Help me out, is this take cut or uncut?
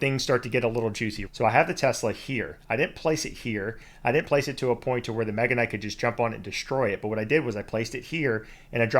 cut